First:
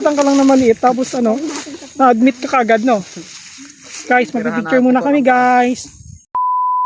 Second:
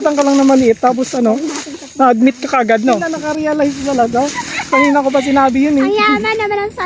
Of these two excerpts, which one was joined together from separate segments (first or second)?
second